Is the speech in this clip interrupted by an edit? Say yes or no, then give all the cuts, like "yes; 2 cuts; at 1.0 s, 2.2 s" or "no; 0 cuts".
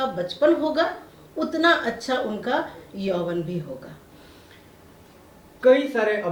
no; 0 cuts